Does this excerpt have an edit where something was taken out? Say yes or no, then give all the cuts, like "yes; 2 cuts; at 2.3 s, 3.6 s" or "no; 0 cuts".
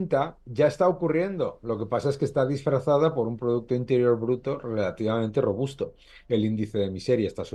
no; 0 cuts